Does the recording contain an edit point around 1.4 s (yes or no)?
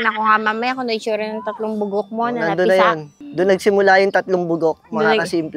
no